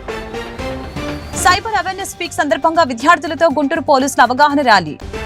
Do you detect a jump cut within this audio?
no; 0 cuts

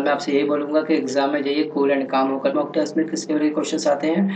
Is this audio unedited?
yes; 0 cuts

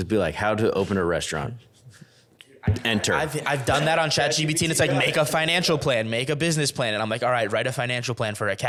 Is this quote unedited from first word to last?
yes; 0 cuts

